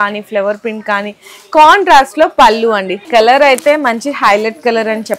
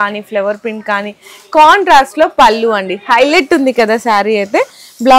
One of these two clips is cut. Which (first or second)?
first